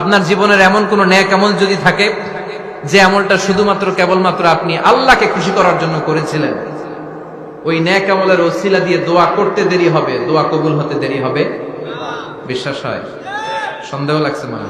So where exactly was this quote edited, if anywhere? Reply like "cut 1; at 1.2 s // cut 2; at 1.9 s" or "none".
none